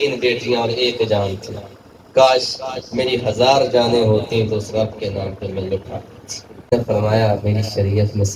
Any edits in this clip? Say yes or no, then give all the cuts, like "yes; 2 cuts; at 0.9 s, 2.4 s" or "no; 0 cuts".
yes; 1 cut; at 6.7 s